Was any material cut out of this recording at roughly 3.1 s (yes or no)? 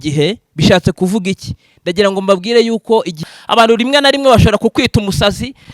yes